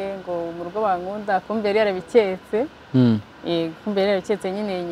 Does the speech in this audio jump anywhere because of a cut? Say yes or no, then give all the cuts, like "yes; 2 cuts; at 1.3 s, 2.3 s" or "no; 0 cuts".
no; 0 cuts